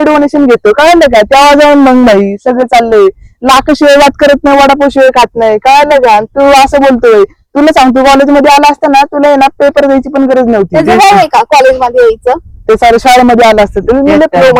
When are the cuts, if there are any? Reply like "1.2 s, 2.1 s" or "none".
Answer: none